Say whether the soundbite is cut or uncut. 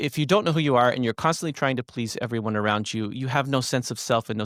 uncut